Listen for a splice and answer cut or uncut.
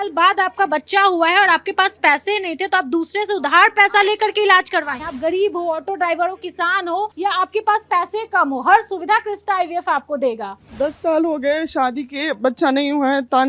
cut